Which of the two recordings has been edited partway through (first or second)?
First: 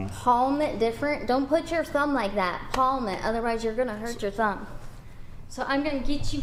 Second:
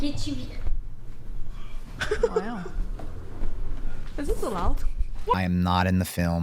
second